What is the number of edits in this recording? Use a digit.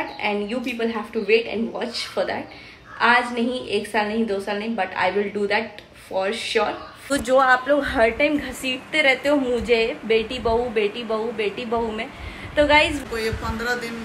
2